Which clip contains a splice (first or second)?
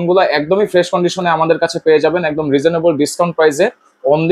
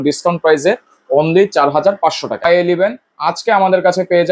second